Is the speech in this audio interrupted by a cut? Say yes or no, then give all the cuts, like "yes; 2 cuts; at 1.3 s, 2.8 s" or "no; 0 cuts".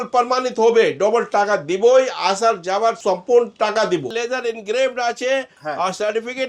yes; 2 cuts; at 3.0 s, 4.1 s